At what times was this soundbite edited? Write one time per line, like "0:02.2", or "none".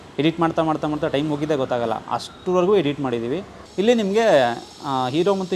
0:03.6